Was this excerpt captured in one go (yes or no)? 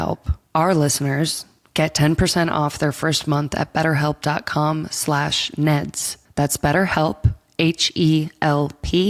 yes